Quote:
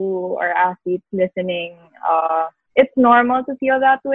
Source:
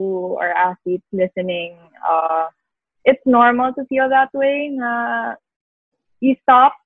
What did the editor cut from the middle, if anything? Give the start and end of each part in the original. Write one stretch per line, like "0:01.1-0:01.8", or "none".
0:02.6-0:02.9